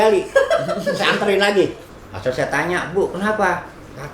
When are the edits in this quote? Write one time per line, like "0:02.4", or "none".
0:01.9